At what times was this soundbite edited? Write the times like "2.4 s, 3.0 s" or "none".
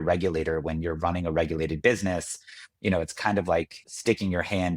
3.8 s